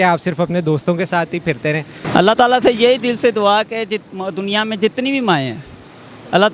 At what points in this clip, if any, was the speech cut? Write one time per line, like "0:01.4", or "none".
0:02.0